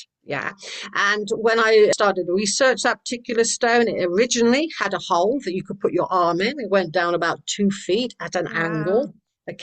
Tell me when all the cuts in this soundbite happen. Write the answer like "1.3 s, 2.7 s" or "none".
1.9 s